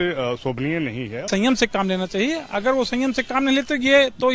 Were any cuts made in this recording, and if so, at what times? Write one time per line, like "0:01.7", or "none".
0:01.3